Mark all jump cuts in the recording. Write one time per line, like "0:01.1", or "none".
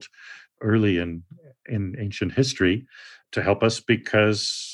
none